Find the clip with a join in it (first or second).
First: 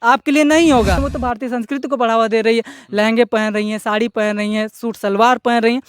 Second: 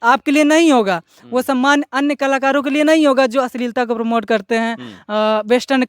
first